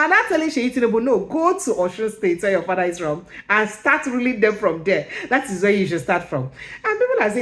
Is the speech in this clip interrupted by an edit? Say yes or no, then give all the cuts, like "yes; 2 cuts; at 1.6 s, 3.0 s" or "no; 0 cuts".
no; 0 cuts